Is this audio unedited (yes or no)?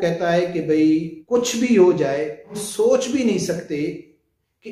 no